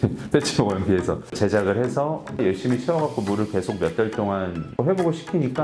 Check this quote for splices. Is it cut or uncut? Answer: cut